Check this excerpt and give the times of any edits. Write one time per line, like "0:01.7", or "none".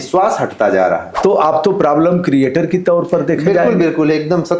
0:01.1